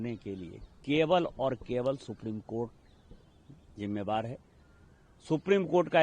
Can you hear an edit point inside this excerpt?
no; 0 cuts

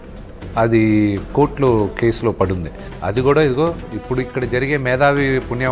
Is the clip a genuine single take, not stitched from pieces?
yes; 0 cuts

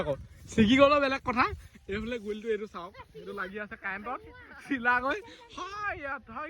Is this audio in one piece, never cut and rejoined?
yes; 0 cuts

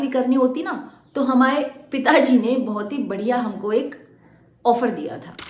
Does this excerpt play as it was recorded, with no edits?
yes; 0 cuts

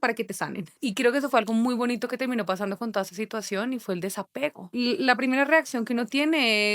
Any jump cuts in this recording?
yes; 2 cuts; at 0.8 s, 4.7 s

